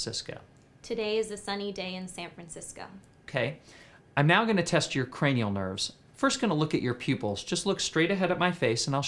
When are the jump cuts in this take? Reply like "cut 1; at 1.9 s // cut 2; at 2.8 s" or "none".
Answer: cut 1; at 5.1 s